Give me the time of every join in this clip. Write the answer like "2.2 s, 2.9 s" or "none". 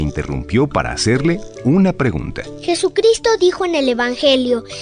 none